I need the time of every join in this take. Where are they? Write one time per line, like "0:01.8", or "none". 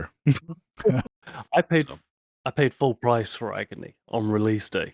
0:01.0